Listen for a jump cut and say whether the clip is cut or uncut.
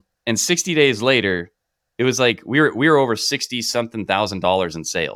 uncut